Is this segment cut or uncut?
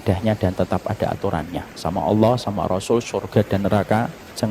uncut